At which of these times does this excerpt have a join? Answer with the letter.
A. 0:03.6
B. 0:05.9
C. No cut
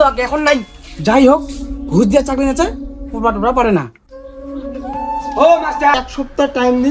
B